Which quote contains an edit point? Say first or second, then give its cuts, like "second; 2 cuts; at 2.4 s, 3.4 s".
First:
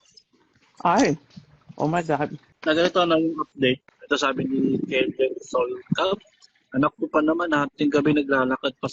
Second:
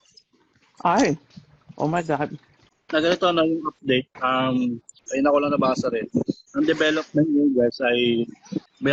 first; 2 cuts; at 2.5 s, 3.9 s